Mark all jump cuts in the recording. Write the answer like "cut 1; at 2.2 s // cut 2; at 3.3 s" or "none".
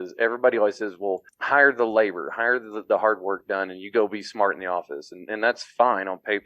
cut 1; at 1.3 s